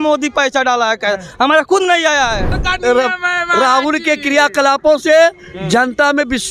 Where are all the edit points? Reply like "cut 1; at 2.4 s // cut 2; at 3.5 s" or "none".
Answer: cut 1; at 2.4 s